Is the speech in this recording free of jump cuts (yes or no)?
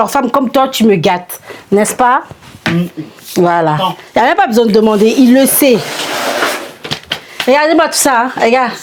yes